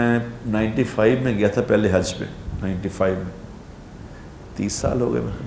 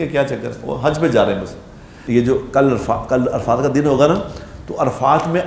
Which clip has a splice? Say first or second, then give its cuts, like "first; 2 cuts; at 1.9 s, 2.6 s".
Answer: second; 1 cut; at 2.0 s